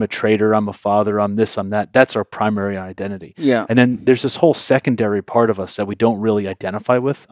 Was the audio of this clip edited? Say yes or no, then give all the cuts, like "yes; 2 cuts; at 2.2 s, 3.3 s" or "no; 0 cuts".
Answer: no; 0 cuts